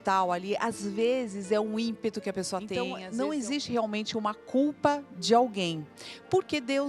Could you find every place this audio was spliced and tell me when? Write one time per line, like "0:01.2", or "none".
0:03.0